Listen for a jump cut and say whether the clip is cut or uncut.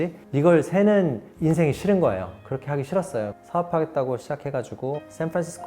cut